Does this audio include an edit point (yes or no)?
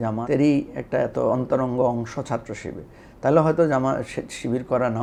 no